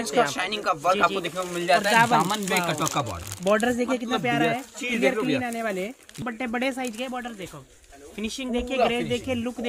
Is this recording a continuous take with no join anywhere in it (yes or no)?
no